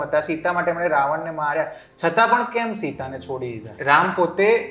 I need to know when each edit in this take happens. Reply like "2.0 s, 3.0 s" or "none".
3.7 s